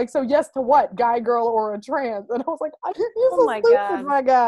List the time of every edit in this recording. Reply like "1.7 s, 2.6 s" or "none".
none